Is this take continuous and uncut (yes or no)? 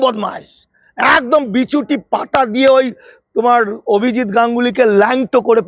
yes